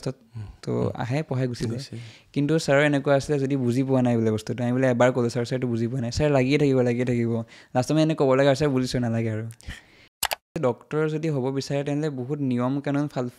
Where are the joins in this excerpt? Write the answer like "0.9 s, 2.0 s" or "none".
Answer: 10.3 s